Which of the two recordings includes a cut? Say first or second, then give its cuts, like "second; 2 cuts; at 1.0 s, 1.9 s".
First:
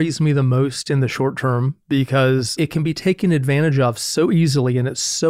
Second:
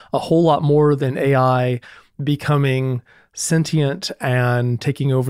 first; 1 cut; at 2.5 s